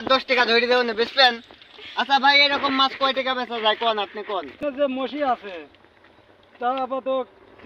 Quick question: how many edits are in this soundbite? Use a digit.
1